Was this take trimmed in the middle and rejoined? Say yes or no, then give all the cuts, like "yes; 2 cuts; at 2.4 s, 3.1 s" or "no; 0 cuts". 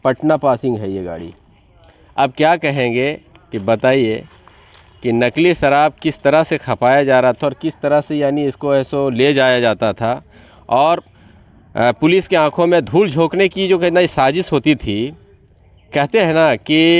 no; 0 cuts